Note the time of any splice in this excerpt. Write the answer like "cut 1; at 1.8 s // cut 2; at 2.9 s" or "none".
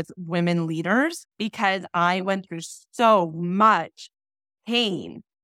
cut 1; at 1.3 s